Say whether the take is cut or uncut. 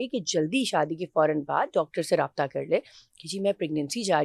uncut